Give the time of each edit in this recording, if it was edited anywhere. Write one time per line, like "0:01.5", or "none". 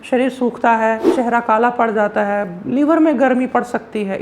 0:01.1